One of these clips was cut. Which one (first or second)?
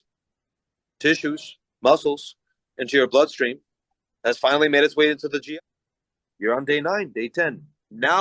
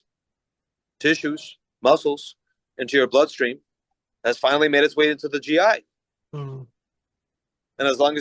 first